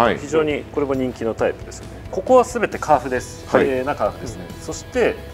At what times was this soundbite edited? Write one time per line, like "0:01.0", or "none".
0:02.1